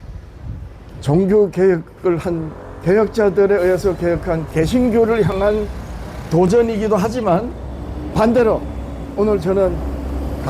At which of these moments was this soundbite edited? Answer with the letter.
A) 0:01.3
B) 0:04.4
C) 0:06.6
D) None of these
B